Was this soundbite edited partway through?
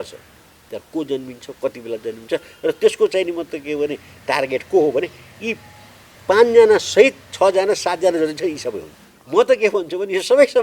yes; 1 cut; at 9.2 s

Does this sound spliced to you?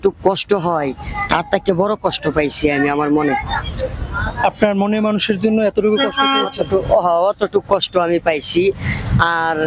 no; 0 cuts

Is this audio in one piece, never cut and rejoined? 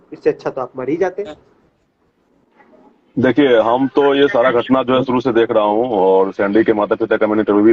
no; 1 cut; at 2.2 s

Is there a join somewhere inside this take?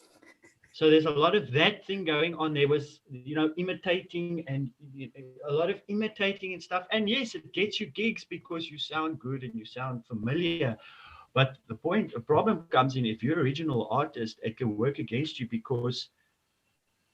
no; 0 cuts

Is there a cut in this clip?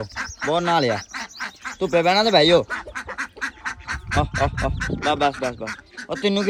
no; 0 cuts

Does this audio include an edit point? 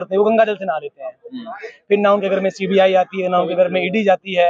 no; 0 cuts

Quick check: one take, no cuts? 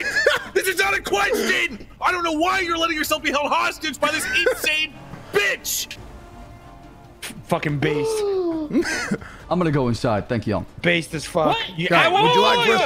no; 2 cuts; at 1.8 s, 9.3 s

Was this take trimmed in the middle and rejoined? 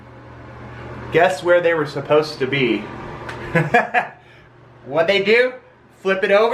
no; 0 cuts

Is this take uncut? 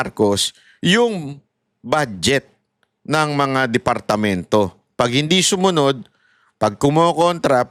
yes; 0 cuts

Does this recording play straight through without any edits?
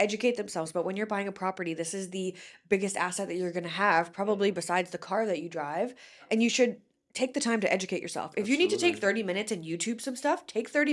yes; 0 cuts

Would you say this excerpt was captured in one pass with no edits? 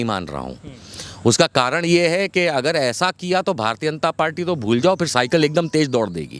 yes; 0 cuts

